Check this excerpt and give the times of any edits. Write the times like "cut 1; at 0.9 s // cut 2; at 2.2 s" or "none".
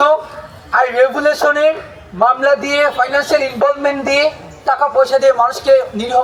none